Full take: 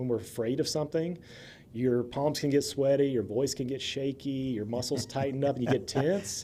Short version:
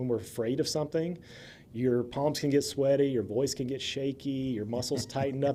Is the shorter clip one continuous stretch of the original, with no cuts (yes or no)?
yes